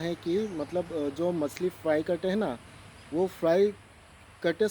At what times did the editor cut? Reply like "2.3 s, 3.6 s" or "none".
none